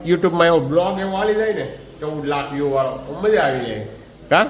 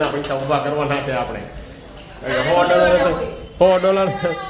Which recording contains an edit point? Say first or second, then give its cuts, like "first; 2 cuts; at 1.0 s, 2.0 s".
second; 1 cut; at 3.4 s